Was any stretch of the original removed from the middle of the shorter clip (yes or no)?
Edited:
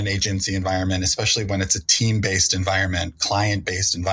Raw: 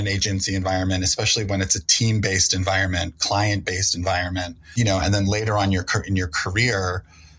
no